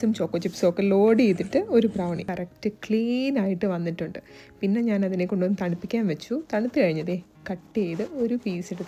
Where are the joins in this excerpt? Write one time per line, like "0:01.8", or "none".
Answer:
0:02.3